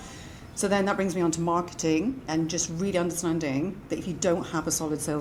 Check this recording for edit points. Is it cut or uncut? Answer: uncut